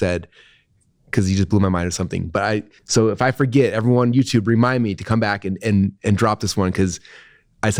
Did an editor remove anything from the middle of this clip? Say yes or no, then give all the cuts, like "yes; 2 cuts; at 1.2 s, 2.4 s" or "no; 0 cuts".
no; 0 cuts